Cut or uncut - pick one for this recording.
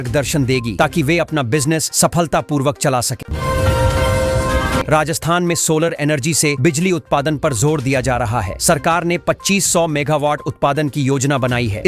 uncut